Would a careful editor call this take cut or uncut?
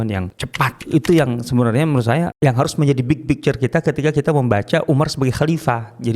cut